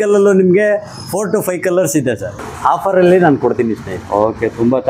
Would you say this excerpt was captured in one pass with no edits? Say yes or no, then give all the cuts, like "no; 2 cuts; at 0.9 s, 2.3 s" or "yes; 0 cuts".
no; 1 cut; at 2.5 s